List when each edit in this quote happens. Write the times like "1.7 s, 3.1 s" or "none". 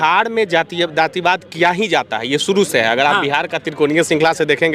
none